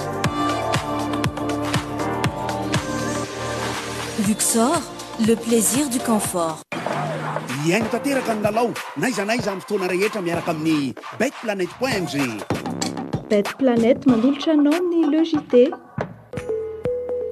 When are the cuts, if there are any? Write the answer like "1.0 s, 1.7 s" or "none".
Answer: 16.2 s